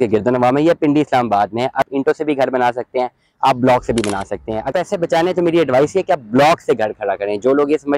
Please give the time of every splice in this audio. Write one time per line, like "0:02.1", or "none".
0:01.9